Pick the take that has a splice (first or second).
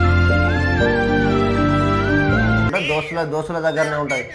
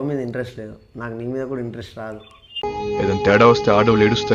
first